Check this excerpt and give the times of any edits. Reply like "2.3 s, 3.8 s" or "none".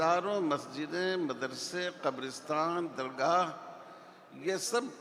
none